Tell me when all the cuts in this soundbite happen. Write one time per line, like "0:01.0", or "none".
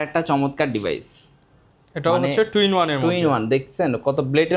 none

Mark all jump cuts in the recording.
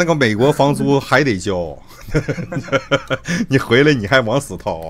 none

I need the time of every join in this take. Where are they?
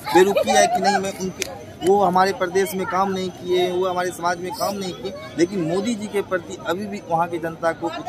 none

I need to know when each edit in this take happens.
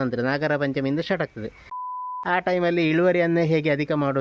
0:01.8

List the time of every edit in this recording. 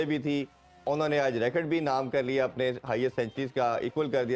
none

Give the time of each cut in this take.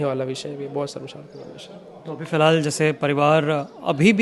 none

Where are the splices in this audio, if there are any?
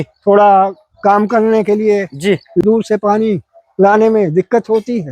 0:02.6

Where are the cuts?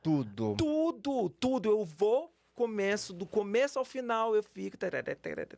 none

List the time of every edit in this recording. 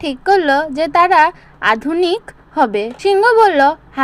0:02.9

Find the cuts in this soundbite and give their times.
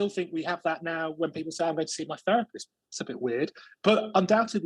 none

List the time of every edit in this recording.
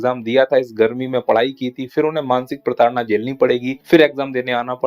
0:03.7

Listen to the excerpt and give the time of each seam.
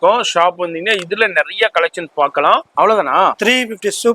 0:02.7

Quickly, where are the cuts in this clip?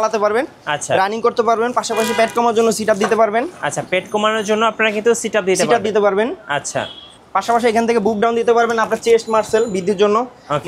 none

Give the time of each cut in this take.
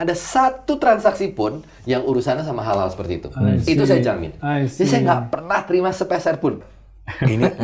0:06.6

